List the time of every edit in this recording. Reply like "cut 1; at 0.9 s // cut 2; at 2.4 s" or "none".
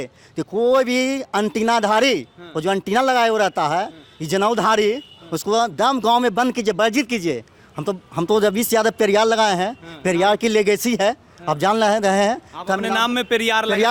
none